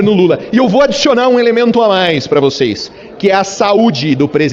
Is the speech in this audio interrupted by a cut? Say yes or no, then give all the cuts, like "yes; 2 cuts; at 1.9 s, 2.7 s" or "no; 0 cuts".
no; 0 cuts